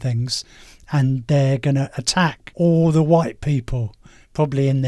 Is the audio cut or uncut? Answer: cut